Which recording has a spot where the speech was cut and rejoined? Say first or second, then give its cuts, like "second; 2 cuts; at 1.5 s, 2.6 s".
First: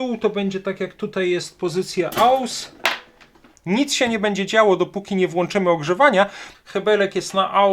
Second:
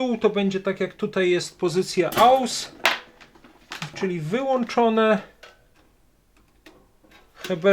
first; 2 cuts; at 3.5 s, 6.5 s